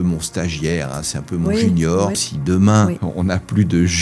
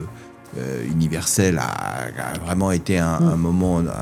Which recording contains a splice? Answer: first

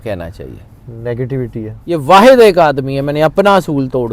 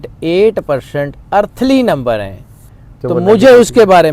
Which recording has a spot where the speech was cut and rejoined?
first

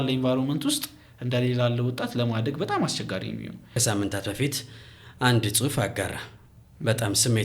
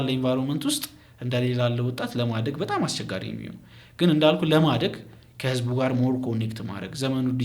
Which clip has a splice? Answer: first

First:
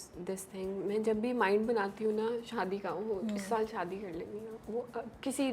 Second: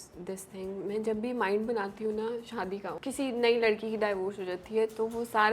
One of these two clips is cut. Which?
second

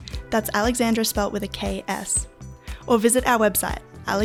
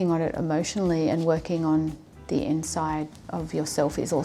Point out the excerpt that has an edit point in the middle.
second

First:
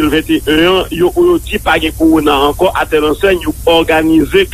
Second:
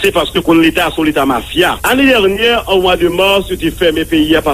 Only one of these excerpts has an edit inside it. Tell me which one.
second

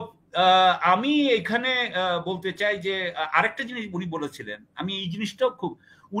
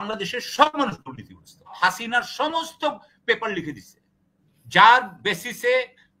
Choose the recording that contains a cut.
second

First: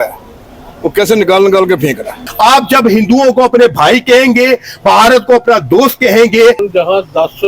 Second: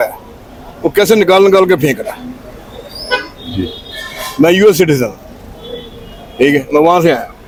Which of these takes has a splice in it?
first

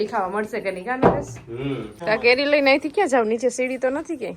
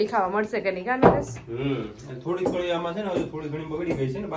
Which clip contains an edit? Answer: first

